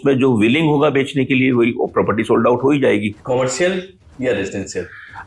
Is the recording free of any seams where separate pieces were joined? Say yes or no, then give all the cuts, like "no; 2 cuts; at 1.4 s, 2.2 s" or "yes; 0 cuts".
no; 2 cuts; at 3.2 s, 4.0 s